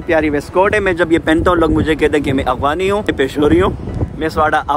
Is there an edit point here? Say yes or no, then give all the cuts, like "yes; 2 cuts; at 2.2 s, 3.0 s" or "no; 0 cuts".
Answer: yes; 1 cut; at 3.1 s